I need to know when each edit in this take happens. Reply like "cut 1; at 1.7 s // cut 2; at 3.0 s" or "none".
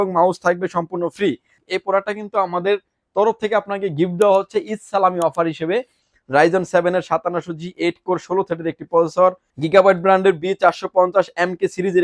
cut 1; at 1.5 s // cut 2; at 6.0 s // cut 3; at 9.6 s